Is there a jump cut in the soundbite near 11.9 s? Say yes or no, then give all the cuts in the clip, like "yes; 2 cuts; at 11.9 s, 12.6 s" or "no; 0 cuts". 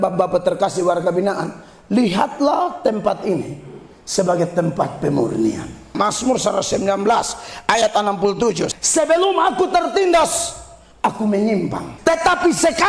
yes; 3 cuts; at 5.9 s, 8.7 s, 11.9 s